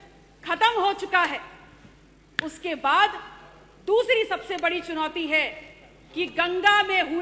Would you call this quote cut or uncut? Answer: uncut